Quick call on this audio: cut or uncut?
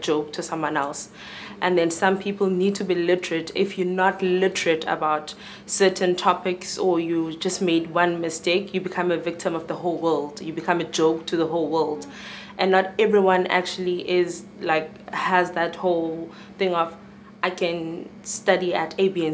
uncut